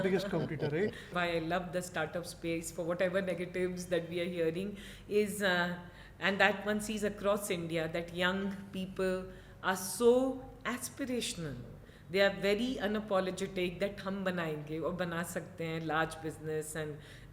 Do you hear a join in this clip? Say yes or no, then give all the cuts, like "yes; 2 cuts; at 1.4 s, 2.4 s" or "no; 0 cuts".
yes; 1 cut; at 1.1 s